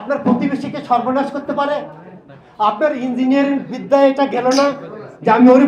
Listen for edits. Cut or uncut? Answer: uncut